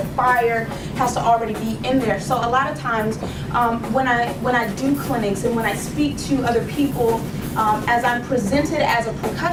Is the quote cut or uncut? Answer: uncut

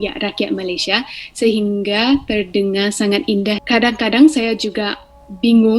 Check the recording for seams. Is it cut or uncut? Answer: cut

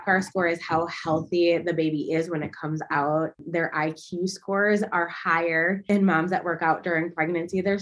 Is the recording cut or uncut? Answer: cut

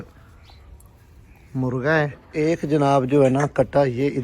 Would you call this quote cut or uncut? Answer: cut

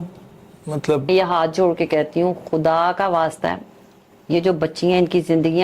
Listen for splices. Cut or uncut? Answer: cut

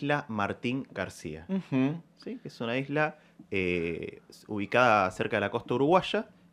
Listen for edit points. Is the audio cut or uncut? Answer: uncut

